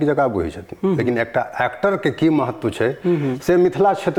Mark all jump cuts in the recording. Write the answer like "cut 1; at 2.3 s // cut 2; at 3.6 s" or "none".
none